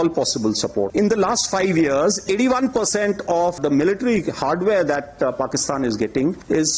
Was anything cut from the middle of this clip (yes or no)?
yes